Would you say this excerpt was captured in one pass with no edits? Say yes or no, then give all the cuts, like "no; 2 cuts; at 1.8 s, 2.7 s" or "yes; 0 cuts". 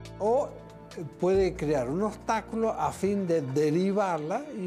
yes; 0 cuts